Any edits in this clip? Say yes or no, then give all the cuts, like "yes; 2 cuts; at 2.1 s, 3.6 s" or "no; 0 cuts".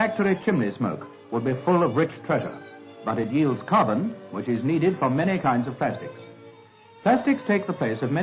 no; 0 cuts